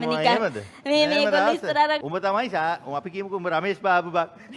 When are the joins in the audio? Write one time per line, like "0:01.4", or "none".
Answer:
0:02.0